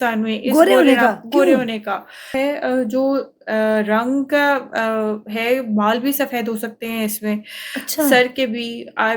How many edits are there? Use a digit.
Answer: 1